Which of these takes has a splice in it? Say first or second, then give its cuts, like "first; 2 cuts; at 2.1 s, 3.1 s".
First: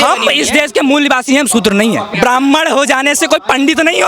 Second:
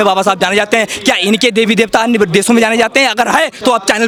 first; 1 cut; at 2.1 s